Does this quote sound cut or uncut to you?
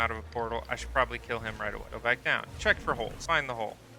uncut